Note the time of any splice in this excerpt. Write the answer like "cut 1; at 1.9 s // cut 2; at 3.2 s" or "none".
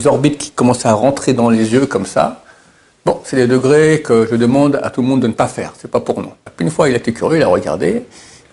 cut 1; at 6.5 s